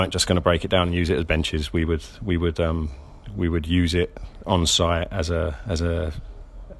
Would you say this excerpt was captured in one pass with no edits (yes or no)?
yes